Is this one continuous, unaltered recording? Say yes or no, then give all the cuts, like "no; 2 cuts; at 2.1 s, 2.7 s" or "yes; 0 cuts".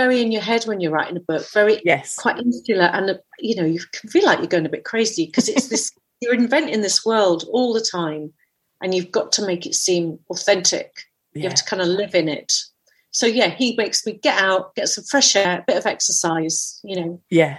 no; 2 cuts; at 12.7 s, 15.5 s